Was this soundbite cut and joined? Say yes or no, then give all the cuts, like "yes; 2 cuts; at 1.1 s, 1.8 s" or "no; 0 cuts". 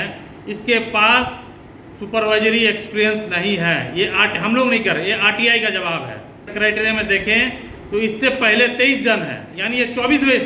yes; 1 cut; at 6.5 s